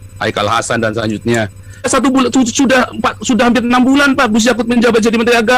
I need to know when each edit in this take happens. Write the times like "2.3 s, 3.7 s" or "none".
1.9 s